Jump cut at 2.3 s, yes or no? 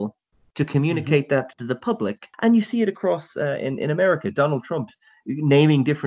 yes